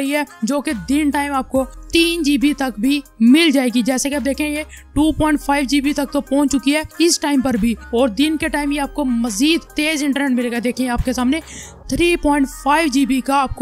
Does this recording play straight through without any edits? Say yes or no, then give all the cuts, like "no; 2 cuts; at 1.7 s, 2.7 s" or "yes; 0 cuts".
yes; 0 cuts